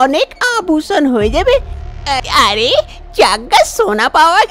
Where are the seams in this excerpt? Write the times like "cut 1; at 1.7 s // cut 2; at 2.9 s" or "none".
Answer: cut 1; at 1.8 s